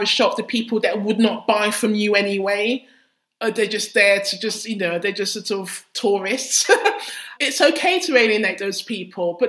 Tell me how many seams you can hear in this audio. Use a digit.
0